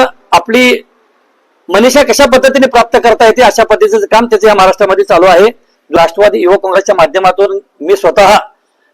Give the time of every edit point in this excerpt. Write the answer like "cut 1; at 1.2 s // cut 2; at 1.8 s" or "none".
cut 1; at 6.0 s